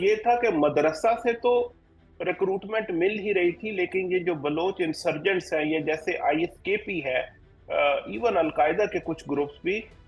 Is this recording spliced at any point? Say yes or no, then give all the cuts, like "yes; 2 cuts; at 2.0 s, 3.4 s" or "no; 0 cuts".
no; 0 cuts